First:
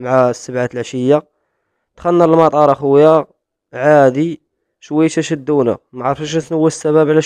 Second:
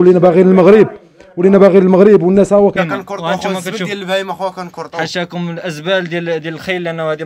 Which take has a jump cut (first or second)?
second